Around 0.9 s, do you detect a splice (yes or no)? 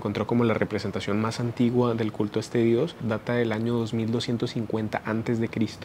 no